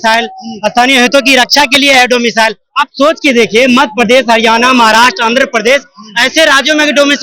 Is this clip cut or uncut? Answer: uncut